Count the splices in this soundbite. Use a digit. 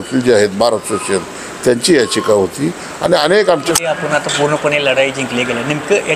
1